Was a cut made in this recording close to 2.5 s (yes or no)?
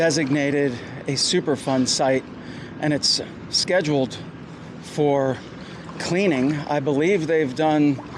no